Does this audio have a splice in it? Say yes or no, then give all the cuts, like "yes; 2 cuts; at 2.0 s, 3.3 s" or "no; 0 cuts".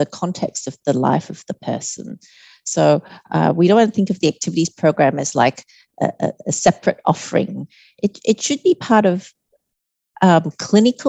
no; 0 cuts